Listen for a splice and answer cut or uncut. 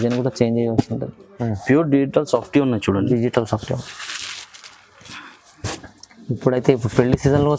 cut